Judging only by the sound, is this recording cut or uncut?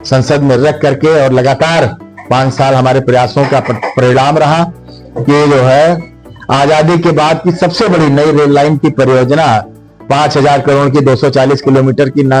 uncut